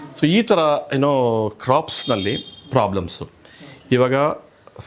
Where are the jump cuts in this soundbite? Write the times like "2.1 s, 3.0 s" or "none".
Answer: none